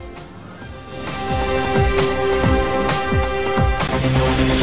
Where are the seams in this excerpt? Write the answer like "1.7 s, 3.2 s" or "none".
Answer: 3.5 s

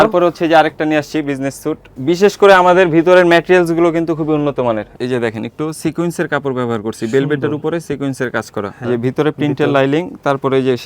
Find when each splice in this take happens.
1.9 s, 4.9 s, 8.8 s

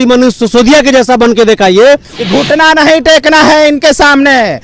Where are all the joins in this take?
1.9 s

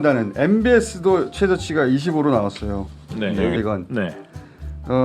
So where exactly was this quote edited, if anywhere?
3.6 s

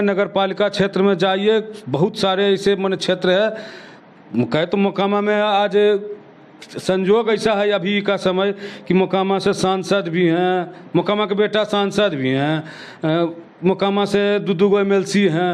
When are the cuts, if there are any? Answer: none

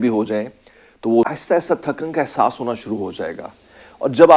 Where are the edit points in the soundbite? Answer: 1.3 s

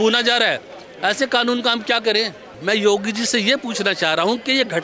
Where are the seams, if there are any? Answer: 2.6 s

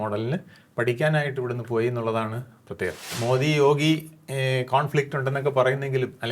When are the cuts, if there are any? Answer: 3.1 s

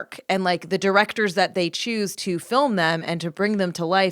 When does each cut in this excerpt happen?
2.1 s

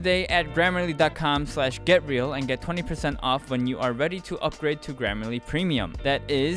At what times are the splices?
none

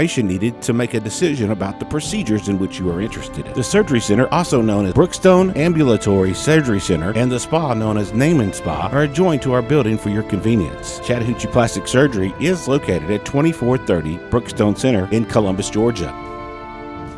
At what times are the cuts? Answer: 16.0 s

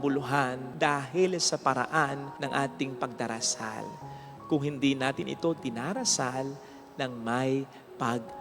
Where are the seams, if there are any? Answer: none

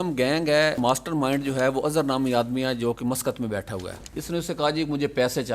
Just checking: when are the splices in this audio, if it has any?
0.8 s, 3.9 s

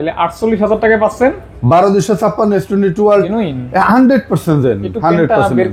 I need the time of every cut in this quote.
3.3 s

